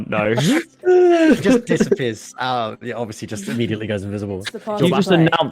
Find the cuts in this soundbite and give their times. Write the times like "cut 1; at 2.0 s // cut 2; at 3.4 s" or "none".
cut 1; at 4.5 s